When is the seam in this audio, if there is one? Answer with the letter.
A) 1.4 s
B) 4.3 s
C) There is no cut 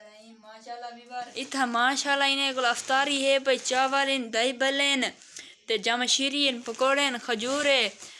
A